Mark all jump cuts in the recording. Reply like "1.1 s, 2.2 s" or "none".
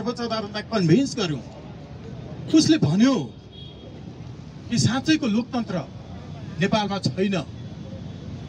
none